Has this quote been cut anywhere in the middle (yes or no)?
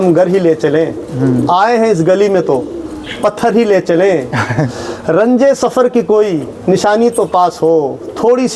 no